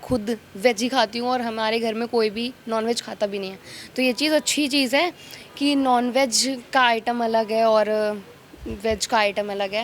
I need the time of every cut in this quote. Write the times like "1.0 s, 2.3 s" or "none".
none